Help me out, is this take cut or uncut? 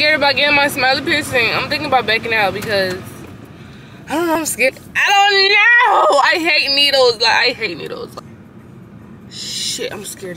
cut